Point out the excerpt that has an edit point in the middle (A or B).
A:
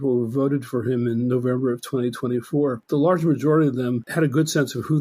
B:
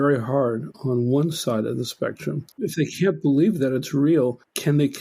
A